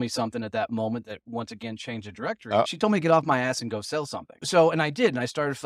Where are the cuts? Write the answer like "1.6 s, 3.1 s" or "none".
2.7 s, 4.4 s

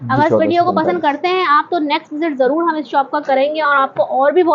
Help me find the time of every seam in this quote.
none

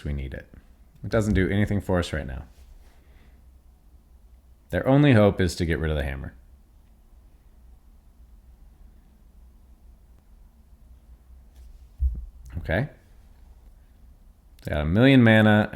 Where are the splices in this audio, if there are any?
10.2 s

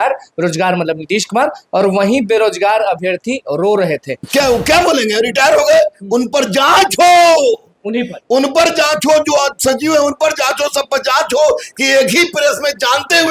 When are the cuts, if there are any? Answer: 4.2 s

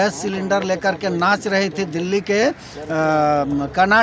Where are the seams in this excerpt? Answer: none

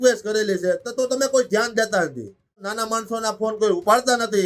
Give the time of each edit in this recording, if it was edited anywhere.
2.7 s

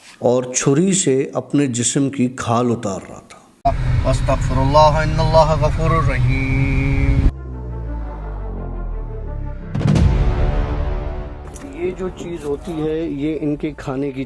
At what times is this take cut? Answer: 3.5 s

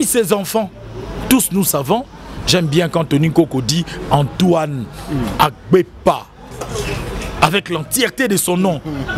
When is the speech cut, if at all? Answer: none

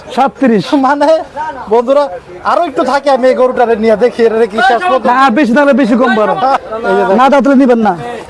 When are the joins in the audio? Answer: 6.6 s

